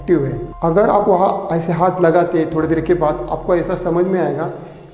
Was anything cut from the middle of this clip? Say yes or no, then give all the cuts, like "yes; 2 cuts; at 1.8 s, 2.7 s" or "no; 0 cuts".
no; 0 cuts